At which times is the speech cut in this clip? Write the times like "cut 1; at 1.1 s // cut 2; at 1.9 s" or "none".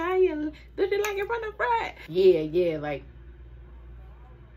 cut 1; at 2.0 s

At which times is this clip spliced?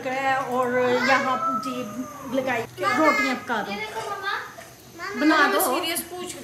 cut 1; at 2.7 s

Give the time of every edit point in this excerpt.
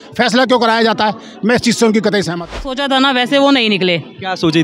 cut 1; at 2.6 s

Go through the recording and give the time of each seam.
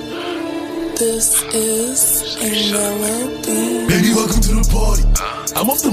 cut 1; at 1.0 s

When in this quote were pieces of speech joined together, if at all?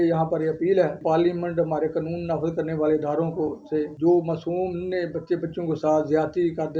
cut 1; at 1.0 s // cut 2; at 3.9 s

